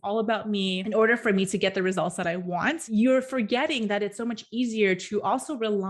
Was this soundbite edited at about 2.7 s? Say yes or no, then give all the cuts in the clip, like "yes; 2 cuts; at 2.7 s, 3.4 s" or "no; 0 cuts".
no; 0 cuts